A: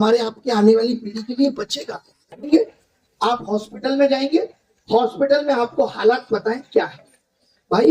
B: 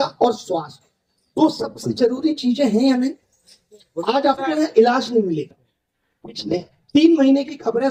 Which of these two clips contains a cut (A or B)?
A